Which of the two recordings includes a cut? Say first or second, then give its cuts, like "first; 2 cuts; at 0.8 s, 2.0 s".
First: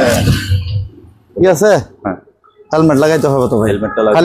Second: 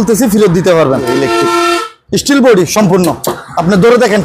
second; 1 cut; at 1.0 s